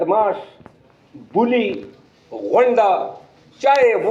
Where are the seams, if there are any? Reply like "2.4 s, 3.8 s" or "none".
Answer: none